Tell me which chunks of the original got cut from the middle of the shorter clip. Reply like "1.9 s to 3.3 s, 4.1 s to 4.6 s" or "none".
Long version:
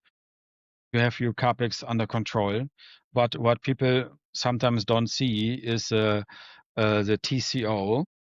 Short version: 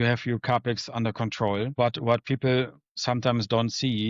2.6 s to 3.1 s

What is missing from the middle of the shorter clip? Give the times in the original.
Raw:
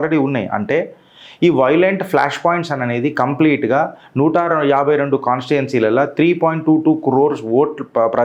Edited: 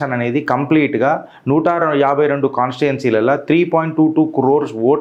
none

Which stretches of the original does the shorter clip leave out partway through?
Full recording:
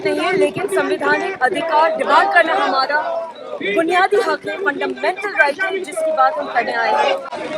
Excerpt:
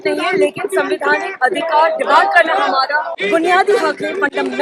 3.1 s to 3.5 s

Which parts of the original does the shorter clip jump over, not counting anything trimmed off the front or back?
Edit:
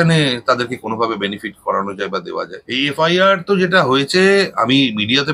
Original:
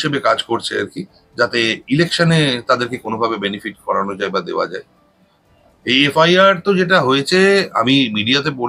4.8 s to 5.8 s

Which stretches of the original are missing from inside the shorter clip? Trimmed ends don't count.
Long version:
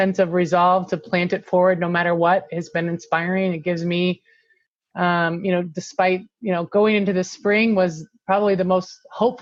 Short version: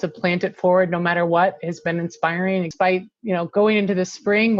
3.6 s to 5.9 s

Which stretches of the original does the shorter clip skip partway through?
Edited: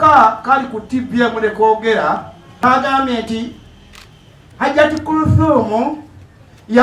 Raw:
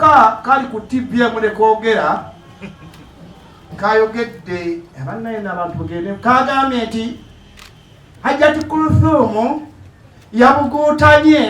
2.6 s to 6.2 s

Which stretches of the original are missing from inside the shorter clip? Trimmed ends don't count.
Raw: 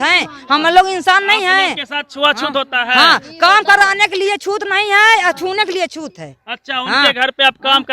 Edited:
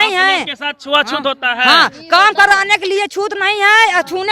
none

